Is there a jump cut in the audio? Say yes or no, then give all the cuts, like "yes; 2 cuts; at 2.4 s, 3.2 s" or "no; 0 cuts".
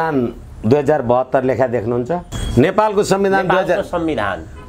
yes; 1 cut; at 2.4 s